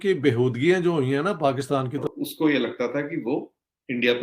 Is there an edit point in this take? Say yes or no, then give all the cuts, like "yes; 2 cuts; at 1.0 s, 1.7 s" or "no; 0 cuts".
yes; 1 cut; at 2.0 s